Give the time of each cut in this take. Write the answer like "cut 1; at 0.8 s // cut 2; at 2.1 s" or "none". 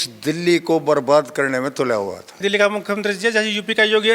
cut 1; at 2.4 s